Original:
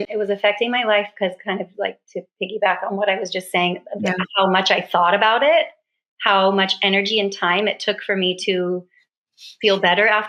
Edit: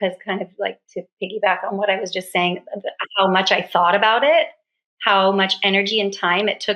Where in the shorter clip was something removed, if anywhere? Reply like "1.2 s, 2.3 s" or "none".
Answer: none

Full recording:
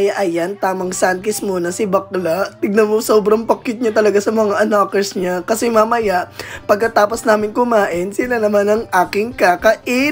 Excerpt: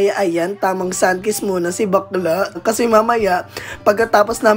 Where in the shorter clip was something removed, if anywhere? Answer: 2.6 s

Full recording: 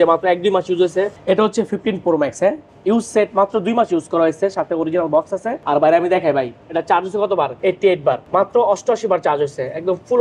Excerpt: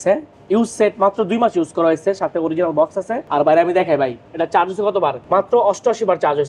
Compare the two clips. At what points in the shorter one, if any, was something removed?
5.2 s

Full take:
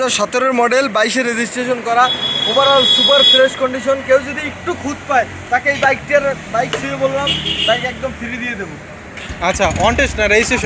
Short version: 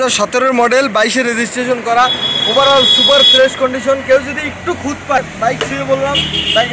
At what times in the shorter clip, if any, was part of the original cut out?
5.2 s

